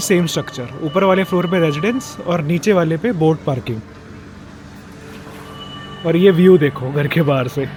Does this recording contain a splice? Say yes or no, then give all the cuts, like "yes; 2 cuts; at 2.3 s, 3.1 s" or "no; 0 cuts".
no; 0 cuts